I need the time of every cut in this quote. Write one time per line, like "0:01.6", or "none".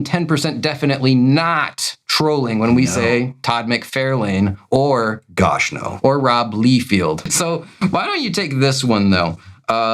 0:07.2